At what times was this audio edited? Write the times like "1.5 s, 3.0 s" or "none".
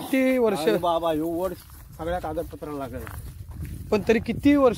none